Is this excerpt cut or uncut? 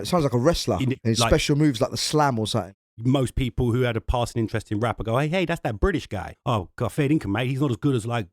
cut